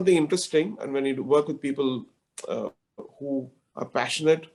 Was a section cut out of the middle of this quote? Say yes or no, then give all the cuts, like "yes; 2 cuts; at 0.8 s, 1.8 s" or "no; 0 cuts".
no; 0 cuts